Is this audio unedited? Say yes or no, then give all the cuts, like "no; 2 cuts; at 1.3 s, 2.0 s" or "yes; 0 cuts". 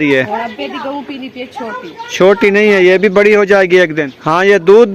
no; 1 cut; at 3.8 s